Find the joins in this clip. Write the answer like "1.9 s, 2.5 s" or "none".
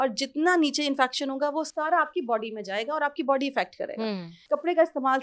4.3 s